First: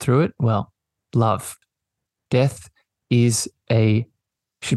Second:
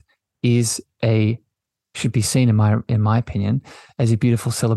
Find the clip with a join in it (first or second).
first